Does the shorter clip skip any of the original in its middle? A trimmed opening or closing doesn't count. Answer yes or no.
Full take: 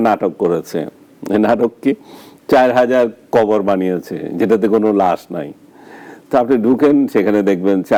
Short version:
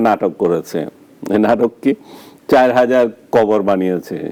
no